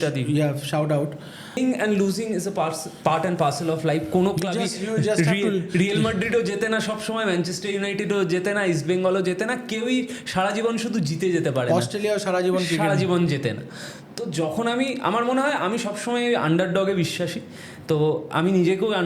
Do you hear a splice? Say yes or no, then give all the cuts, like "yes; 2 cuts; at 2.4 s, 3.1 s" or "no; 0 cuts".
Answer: yes; 1 cut; at 1.6 s